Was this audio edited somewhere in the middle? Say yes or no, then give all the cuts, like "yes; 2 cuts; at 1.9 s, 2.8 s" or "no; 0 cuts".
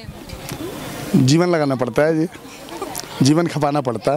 no; 0 cuts